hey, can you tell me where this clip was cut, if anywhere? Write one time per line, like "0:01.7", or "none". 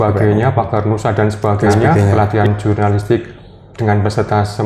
0:02.1